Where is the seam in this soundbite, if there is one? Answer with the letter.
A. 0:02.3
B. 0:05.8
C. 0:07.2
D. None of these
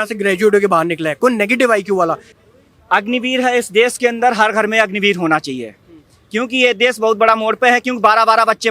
A